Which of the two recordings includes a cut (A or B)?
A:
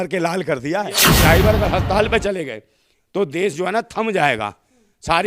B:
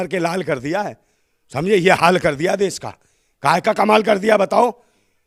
A